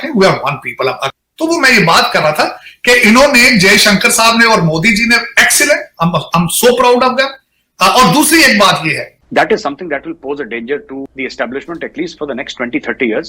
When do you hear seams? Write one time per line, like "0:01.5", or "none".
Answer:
0:01.1
0:09.0